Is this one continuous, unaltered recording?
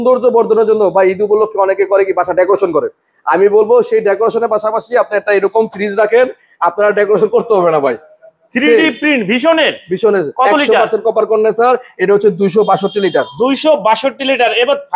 yes; 0 cuts

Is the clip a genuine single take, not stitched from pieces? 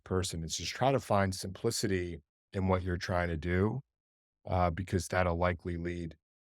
no; 3 cuts; at 1.0 s, 2.4 s, 5.1 s

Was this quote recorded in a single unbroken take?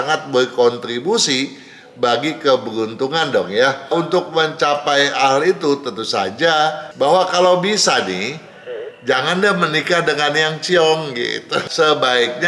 no; 3 cuts; at 3.9 s, 6.9 s, 11.5 s

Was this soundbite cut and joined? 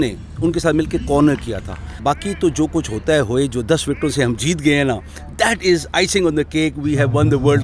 yes; 1 cut; at 2.0 s

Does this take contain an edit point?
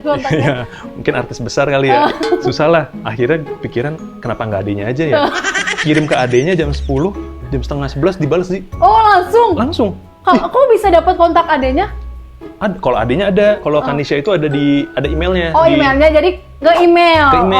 no; 0 cuts

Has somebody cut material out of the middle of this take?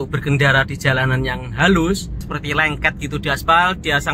yes; 1 cut; at 2.3 s

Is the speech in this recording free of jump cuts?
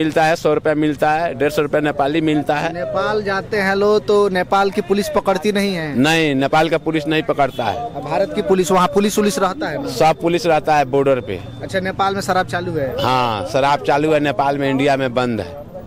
yes; 0 cuts

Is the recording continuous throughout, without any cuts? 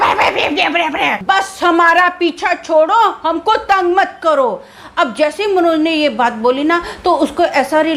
no; 1 cut; at 1.2 s

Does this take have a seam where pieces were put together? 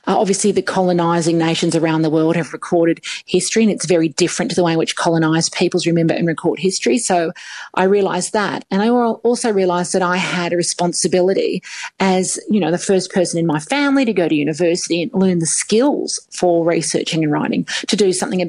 no; 0 cuts

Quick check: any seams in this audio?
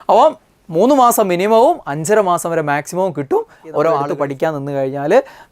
yes; 1 cut; at 4.1 s

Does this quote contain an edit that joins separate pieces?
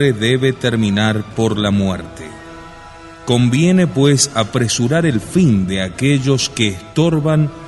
no; 0 cuts

